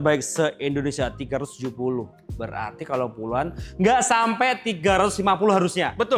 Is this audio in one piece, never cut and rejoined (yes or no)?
yes